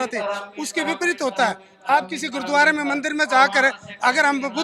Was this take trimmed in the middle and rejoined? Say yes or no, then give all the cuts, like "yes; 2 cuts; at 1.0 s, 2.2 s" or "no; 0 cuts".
no; 0 cuts